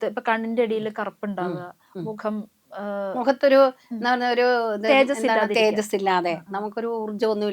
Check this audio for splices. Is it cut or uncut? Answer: uncut